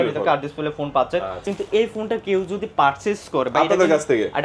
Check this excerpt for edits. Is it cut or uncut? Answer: cut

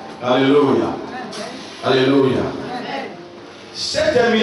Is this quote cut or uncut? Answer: uncut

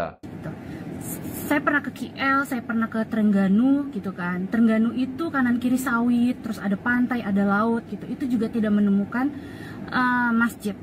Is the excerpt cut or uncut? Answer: uncut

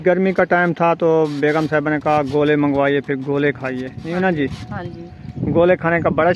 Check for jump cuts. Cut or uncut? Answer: cut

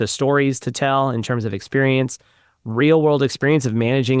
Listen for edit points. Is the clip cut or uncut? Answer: uncut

